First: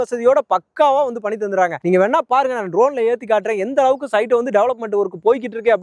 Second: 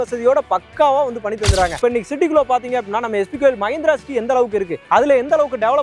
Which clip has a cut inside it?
second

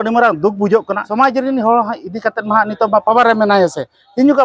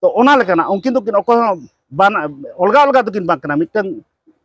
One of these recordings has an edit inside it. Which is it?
first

